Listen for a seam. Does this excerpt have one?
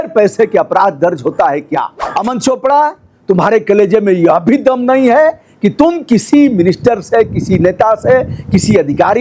yes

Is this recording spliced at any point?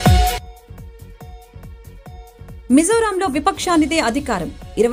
no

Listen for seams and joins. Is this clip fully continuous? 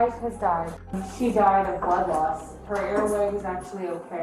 no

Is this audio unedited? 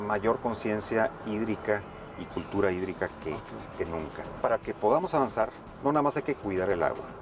no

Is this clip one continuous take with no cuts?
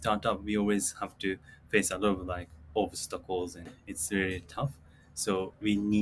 no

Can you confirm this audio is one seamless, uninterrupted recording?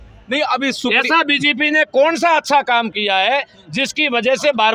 yes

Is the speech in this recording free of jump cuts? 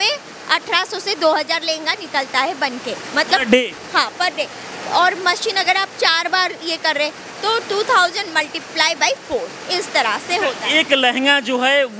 yes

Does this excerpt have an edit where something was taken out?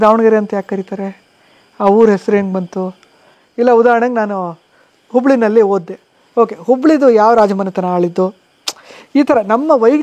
no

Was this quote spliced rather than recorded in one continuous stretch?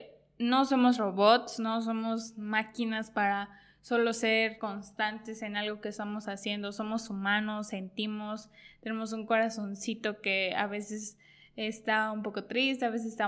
yes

